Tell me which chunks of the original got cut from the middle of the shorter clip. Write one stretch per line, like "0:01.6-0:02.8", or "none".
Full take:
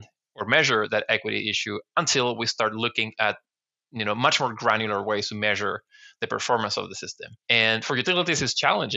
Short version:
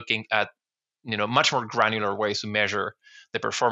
none